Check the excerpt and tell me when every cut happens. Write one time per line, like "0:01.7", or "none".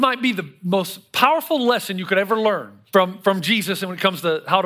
0:02.7